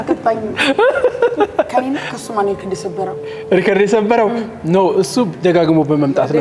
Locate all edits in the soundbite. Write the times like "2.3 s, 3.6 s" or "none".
none

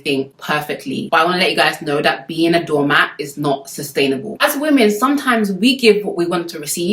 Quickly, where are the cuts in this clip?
4.3 s

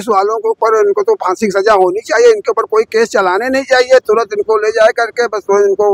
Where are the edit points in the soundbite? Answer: none

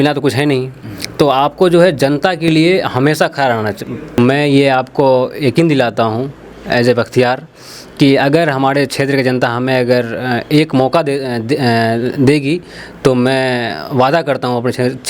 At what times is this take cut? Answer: 4.2 s

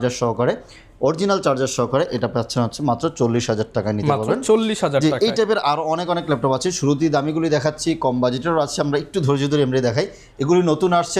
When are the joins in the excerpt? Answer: none

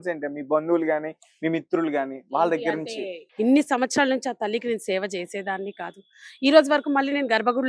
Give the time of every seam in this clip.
3.2 s

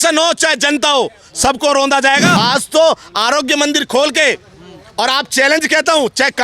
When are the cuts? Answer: 2.3 s

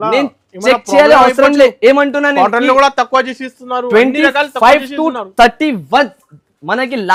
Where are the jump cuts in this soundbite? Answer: none

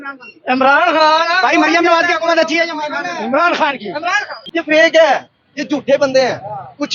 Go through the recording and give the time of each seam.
4.4 s

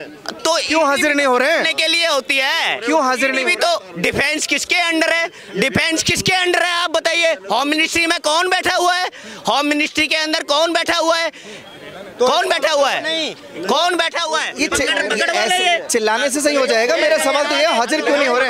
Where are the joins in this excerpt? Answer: none

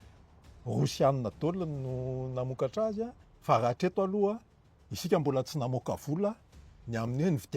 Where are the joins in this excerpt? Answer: 3.3 s

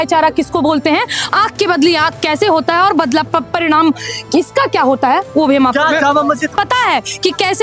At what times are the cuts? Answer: 6.5 s

